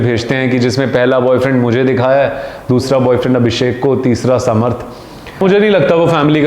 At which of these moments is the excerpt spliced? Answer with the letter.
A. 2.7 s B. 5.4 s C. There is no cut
B